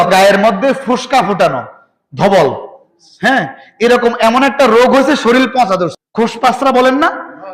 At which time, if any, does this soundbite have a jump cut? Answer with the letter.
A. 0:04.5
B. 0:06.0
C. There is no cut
B